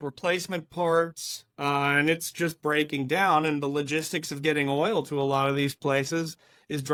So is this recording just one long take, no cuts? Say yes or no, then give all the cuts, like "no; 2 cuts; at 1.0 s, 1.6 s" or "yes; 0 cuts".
yes; 0 cuts